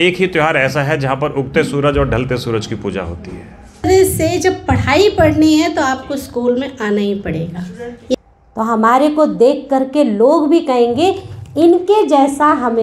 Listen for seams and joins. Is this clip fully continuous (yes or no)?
no